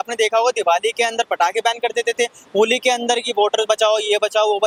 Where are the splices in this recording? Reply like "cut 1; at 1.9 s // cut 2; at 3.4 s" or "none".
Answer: none